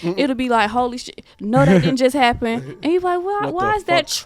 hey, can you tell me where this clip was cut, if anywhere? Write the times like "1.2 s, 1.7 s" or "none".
none